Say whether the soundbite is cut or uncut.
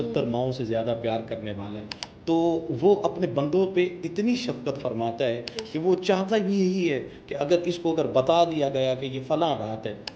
uncut